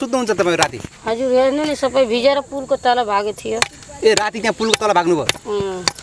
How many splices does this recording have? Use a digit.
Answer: 0